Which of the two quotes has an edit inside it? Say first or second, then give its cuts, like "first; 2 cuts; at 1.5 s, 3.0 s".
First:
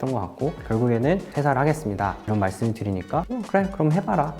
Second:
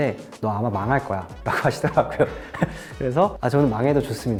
first; 1 cut; at 1.3 s